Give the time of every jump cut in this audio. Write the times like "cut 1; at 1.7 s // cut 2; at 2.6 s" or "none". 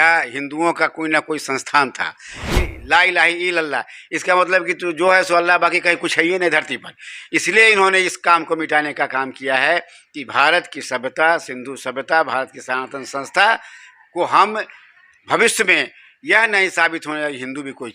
cut 1; at 2.5 s